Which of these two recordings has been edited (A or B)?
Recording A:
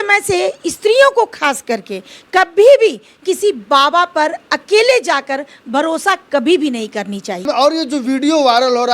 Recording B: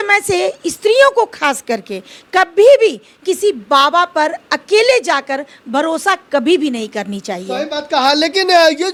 A